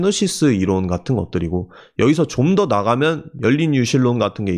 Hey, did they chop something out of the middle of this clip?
no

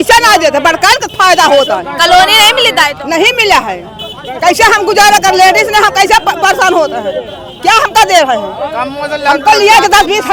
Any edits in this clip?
no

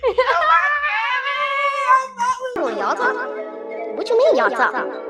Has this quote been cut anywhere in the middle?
yes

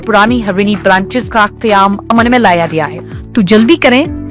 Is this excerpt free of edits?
no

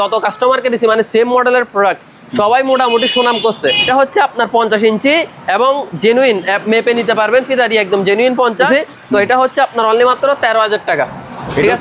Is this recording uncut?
no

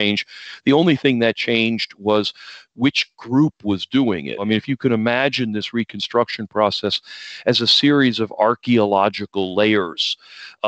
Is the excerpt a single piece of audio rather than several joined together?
no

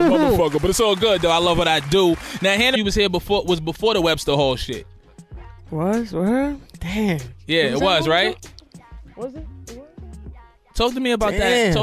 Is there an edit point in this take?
no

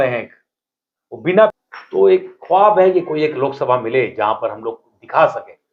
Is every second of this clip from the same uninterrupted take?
no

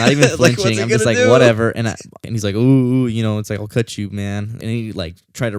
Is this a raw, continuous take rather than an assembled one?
no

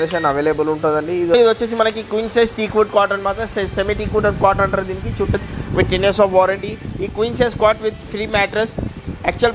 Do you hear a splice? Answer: yes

